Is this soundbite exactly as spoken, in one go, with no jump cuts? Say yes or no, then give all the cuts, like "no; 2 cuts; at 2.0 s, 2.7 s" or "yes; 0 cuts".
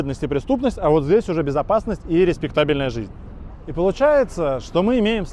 yes; 0 cuts